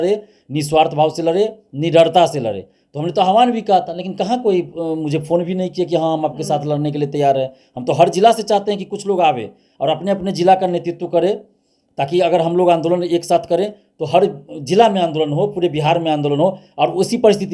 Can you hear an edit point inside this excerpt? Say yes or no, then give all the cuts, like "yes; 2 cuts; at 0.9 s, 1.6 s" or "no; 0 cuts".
no; 0 cuts